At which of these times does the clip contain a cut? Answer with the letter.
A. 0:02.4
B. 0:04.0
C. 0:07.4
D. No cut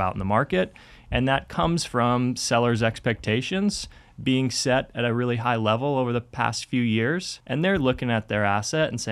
C